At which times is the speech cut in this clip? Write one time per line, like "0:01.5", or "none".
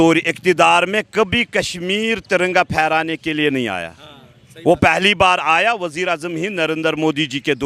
none